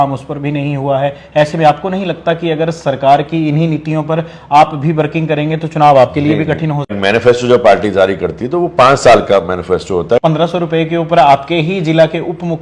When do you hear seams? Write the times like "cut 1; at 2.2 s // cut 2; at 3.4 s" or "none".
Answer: cut 1; at 7.0 s // cut 2; at 10.2 s